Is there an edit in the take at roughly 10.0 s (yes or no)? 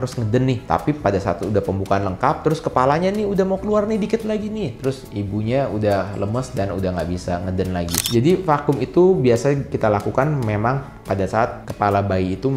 no